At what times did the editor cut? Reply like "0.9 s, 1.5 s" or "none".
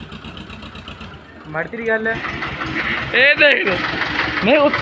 2.2 s